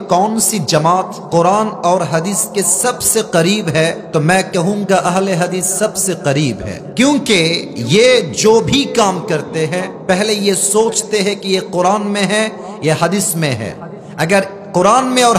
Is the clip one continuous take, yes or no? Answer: no